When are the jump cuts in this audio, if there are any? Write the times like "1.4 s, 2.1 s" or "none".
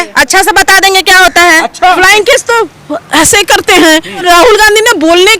2.0 s, 4.2 s